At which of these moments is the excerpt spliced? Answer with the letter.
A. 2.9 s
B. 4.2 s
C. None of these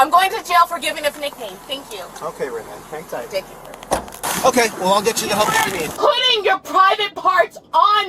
B